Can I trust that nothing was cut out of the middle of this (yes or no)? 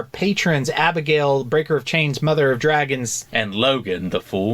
no